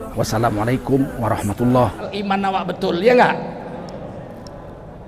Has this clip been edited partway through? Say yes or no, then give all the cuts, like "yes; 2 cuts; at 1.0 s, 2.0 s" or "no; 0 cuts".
yes; 1 cut; at 2.1 s